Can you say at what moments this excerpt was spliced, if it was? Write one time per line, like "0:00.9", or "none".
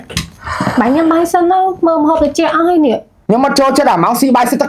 0:03.1